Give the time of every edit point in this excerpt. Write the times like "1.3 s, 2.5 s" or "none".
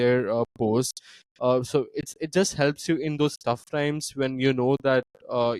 none